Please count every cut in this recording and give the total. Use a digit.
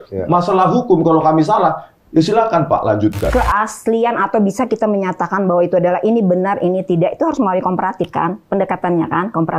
1